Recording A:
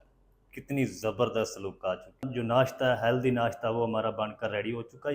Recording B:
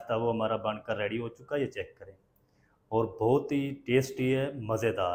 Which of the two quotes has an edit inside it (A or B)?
A